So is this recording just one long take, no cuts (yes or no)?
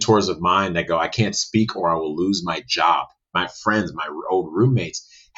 no